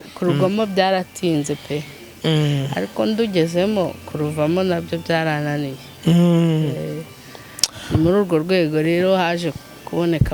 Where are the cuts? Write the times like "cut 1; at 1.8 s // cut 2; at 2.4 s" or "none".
none